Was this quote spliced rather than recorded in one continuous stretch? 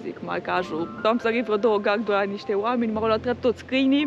yes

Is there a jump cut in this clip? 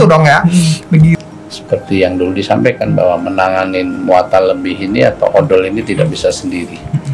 yes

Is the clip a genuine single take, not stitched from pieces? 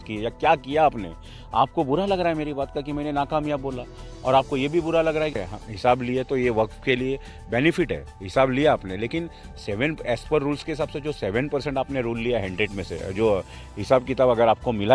no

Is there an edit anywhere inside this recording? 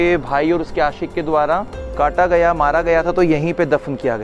yes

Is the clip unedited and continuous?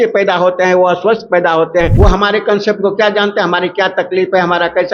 no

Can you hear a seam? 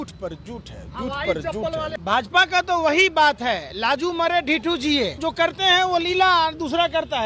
yes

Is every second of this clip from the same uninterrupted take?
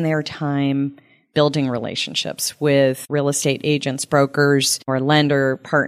no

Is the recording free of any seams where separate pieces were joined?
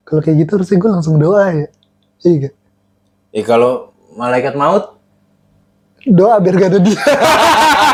yes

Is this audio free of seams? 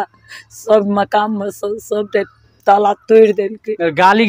yes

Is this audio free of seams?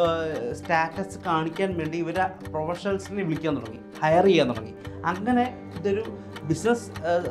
yes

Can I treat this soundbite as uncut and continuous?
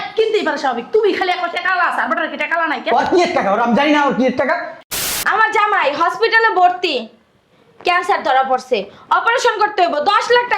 no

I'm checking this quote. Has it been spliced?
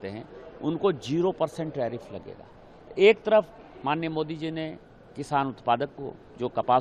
no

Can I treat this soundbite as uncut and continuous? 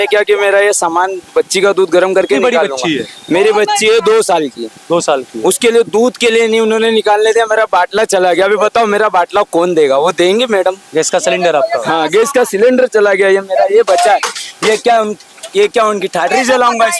yes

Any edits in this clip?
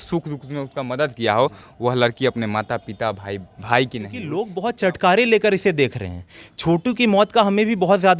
yes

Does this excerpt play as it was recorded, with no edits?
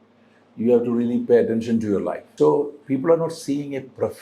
no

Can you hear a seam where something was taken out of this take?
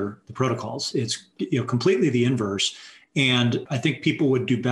yes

